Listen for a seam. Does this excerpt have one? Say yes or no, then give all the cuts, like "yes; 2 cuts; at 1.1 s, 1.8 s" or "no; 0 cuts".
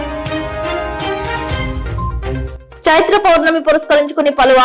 yes; 2 cuts; at 1.1 s, 2.4 s